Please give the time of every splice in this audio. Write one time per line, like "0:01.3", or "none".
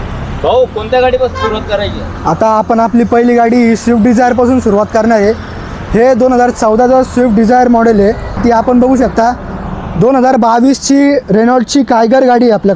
0:08.4